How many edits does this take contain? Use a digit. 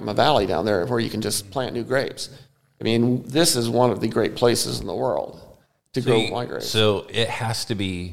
0